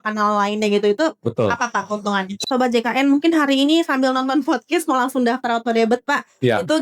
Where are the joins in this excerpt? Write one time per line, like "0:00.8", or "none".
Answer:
0:02.4